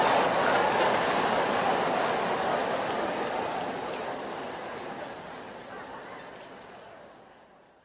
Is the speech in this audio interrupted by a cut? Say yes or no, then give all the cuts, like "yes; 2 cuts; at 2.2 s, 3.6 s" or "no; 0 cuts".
yes; 1 cut; at 3.1 s